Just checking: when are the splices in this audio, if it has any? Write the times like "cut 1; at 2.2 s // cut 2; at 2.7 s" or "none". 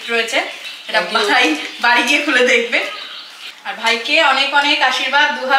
none